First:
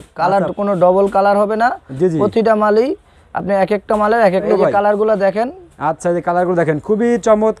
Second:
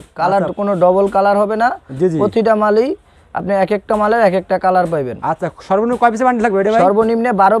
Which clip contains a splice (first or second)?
first